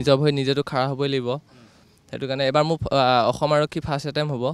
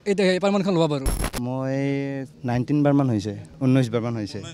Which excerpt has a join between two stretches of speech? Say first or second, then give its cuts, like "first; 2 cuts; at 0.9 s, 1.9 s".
second; 3 cuts; at 1.2 s, 2.3 s, 3.4 s